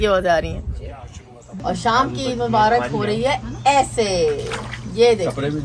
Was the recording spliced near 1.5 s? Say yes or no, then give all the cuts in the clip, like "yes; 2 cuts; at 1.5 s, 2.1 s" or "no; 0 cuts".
yes; 1 cut; at 1.5 s